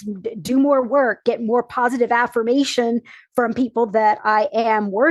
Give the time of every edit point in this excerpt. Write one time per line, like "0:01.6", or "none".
none